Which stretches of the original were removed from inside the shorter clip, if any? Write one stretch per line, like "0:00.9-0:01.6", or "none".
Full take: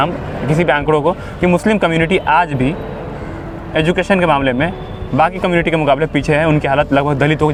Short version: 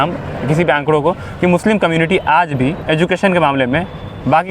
0:02.8-0:03.7